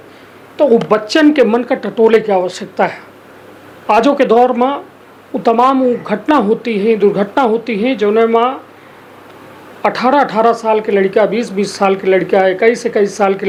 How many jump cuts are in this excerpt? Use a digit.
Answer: 0